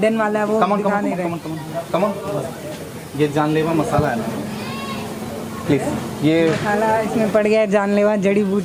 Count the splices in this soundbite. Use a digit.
0